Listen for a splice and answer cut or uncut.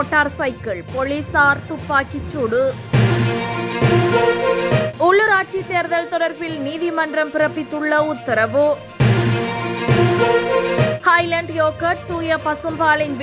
uncut